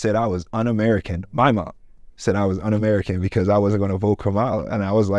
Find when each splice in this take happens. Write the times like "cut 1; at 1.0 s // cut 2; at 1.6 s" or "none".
none